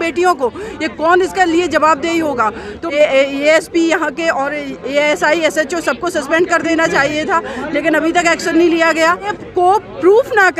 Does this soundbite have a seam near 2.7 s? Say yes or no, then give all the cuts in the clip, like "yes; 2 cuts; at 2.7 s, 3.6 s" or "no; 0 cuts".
yes; 2 cuts; at 2.7 s, 9.4 s